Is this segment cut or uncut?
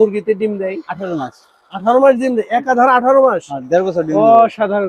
uncut